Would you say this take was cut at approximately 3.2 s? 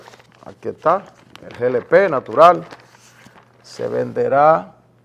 yes; 1 cut; at 3.2 s

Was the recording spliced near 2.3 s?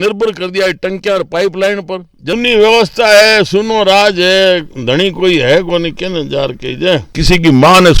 yes; 2 cuts; at 2.3 s, 7.1 s

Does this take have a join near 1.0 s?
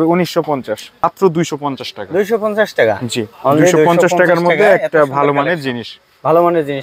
yes; 1 cut; at 1.0 s

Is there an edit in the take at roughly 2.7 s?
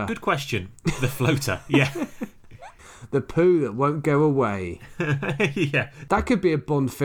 yes; 1 cut; at 2.7 s

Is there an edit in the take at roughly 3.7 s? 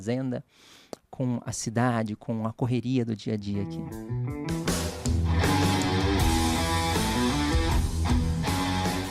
yes; 1 cut; at 3.7 s

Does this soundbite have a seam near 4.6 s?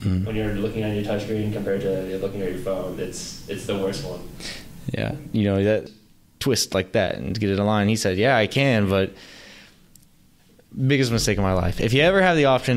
no; 1 cut; at 5.8 s

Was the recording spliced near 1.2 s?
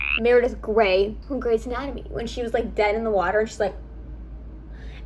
yes; 1 cut; at 1.2 s

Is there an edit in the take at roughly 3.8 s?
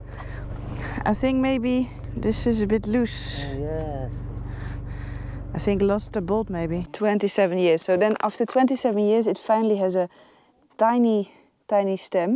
no; 2 cuts; at 2.0 s, 6.9 s

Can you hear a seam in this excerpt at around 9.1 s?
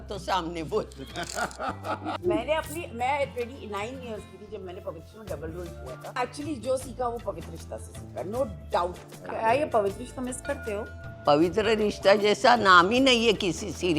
yes; 3 cuts; at 2.1 s, 6.2 s, 9.1 s

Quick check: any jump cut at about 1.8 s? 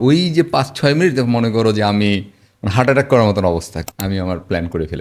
no; 1 cut; at 3.8 s

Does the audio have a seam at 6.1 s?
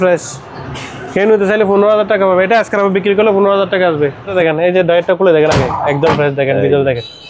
no; 1 cut; at 4.3 s

